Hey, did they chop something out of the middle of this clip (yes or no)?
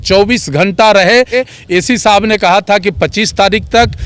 yes